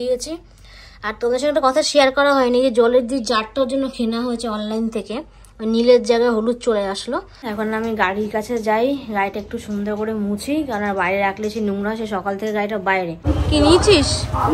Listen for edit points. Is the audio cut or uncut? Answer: cut